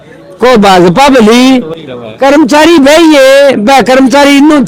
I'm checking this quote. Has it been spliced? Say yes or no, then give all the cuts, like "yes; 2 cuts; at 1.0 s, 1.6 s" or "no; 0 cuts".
no; 0 cuts